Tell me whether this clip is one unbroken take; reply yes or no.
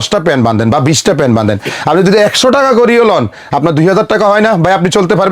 yes